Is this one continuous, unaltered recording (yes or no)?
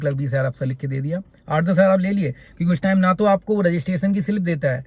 yes